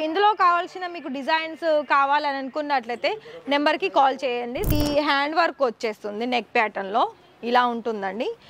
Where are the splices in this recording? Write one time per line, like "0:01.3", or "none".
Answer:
0:04.7